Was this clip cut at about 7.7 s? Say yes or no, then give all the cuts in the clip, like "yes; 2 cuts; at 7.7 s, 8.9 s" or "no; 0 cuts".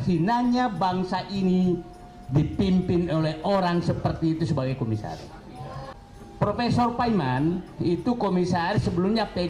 no; 1 cut; at 5.9 s